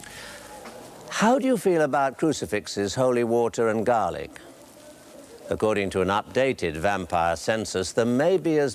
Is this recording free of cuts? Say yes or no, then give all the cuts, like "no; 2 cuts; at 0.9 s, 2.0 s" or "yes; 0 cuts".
no; 1 cut; at 6.8 s